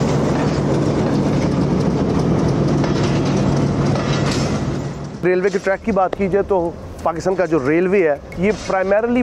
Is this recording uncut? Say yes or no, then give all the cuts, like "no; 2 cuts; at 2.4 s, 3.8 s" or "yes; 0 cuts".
yes; 0 cuts